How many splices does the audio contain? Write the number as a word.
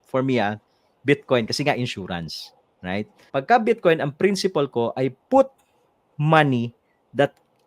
one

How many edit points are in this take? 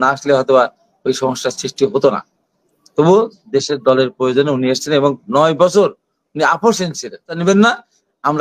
one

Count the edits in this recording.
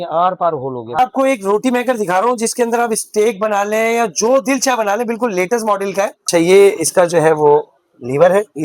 two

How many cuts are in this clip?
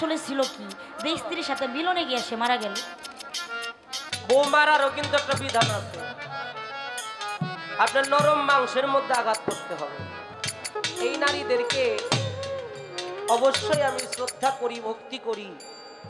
two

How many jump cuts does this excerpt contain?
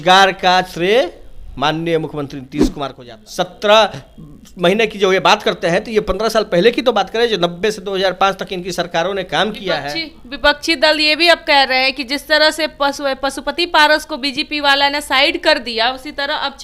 one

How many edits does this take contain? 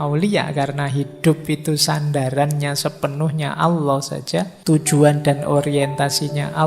one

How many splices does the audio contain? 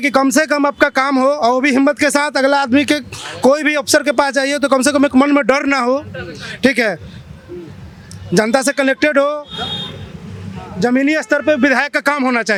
zero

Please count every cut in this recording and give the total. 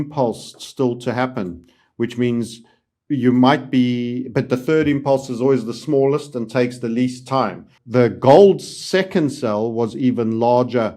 one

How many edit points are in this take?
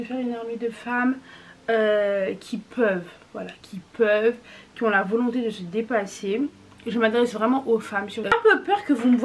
one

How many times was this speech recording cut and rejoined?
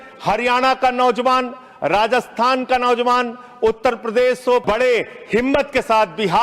one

